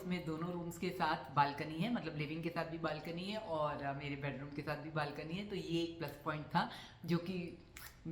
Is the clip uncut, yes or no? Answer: yes